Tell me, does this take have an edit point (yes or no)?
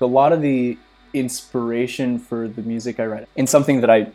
yes